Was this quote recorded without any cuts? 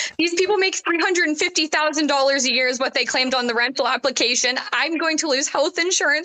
yes; 0 cuts

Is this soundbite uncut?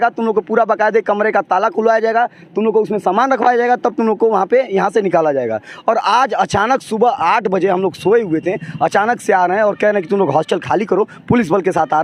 yes; 0 cuts

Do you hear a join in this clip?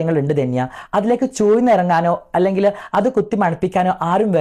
no; 0 cuts

